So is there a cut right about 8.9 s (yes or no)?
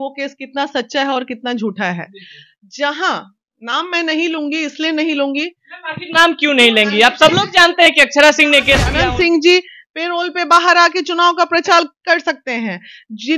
yes